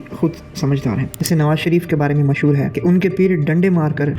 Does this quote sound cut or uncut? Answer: cut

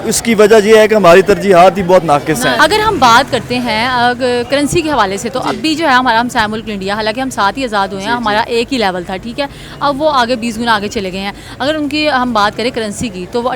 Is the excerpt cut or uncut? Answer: cut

